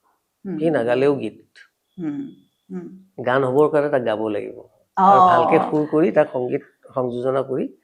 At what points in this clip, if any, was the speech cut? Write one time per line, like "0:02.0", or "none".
none